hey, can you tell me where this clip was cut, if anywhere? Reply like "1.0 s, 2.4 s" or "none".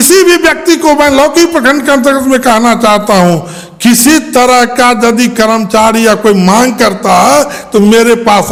none